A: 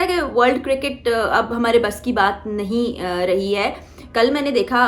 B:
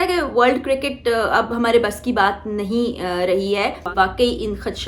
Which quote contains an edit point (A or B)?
B